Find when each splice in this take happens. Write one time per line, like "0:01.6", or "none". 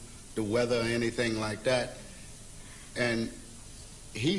none